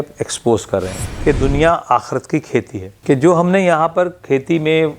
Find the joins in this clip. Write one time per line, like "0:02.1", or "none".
0:01.1
0:02.9